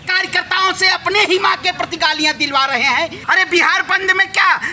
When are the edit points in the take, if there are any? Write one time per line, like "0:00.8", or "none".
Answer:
0:03.2